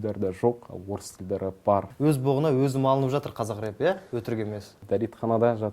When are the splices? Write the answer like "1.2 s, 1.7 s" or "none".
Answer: 1.9 s, 4.8 s